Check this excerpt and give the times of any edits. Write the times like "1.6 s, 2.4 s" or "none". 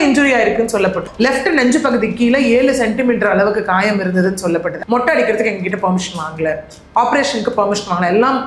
1.1 s, 4.8 s